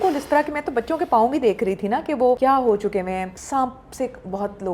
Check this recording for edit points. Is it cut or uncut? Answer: cut